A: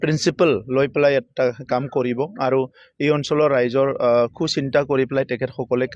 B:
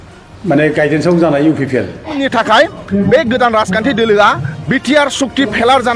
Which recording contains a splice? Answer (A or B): B